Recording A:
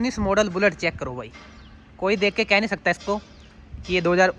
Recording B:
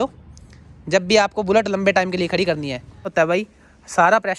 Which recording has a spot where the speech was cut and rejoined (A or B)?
B